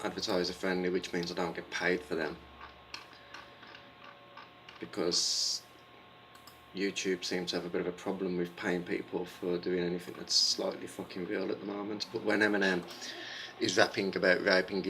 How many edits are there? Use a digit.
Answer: 1